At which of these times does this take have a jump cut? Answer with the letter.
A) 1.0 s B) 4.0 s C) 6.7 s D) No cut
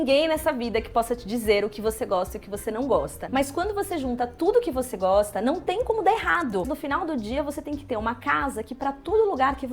C